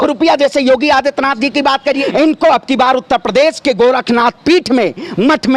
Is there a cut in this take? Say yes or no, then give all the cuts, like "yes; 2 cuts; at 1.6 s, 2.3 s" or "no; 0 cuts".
yes; 1 cut; at 2.0 s